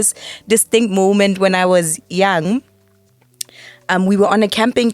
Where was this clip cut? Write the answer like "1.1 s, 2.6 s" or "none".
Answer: none